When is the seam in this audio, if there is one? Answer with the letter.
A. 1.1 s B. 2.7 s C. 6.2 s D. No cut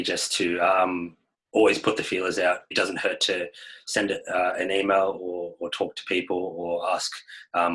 B